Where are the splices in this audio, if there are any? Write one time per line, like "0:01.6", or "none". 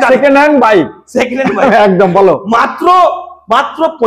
none